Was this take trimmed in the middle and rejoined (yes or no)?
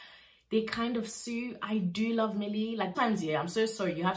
yes